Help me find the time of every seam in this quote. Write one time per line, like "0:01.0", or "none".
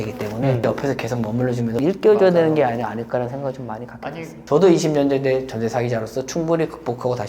0:01.8
0:04.4